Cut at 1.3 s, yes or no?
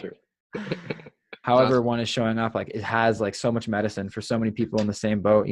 yes